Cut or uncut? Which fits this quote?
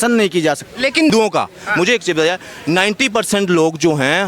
cut